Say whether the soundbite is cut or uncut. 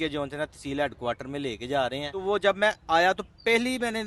cut